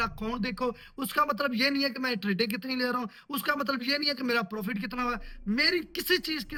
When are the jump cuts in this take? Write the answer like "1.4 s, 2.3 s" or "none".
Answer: none